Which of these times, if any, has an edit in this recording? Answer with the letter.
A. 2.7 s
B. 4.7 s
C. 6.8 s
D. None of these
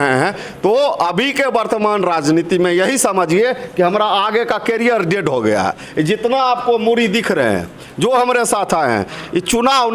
D